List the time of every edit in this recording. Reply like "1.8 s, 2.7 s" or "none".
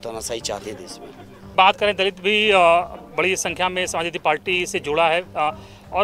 1.5 s